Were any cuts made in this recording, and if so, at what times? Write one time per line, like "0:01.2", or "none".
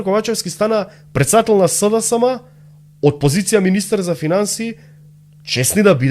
none